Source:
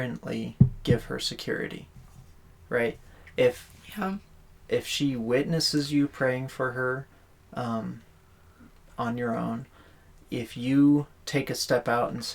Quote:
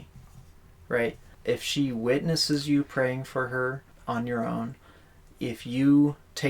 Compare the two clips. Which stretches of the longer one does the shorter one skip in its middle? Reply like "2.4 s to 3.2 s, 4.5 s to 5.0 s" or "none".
3.1 s to 4.5 s, 7.1 s to 8.8 s